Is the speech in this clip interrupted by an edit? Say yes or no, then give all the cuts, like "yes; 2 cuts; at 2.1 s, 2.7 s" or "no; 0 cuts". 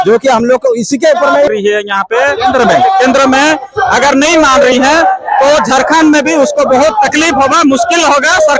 yes; 1 cut; at 1.5 s